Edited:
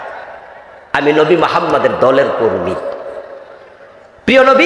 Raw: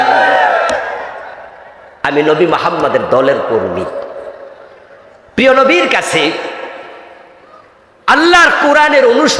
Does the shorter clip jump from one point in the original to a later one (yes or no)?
no